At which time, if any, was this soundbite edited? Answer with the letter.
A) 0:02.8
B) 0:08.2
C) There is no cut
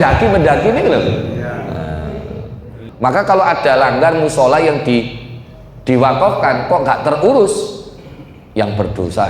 A